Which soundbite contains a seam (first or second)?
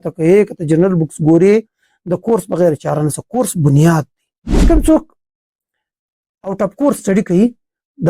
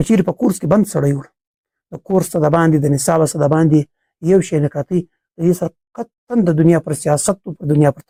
first